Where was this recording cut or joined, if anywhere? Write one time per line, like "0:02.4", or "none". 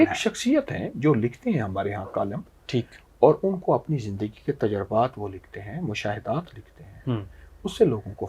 none